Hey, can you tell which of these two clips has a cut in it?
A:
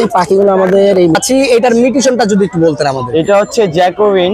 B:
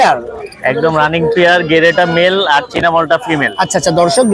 A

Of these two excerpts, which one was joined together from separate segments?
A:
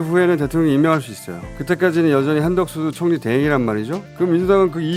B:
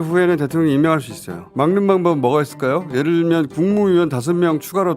B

